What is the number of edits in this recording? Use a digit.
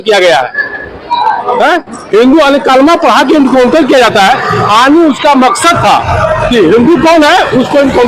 0